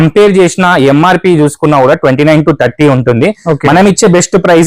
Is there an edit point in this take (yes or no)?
no